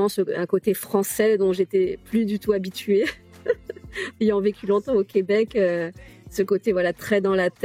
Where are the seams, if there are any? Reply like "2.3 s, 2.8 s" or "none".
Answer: none